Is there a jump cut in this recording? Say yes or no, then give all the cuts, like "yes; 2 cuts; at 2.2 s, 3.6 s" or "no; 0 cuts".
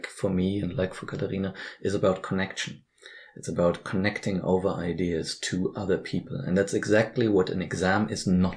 no; 0 cuts